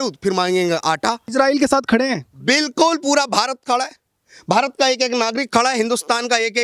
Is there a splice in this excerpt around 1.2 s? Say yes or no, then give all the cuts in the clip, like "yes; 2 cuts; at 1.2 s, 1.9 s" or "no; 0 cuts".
yes; 1 cut; at 1.2 s